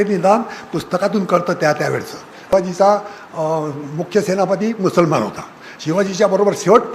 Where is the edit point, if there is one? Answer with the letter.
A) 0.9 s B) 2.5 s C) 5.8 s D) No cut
B